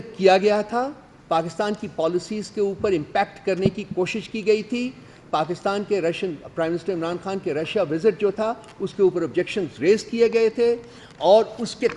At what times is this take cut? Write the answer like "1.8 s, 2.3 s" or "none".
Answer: none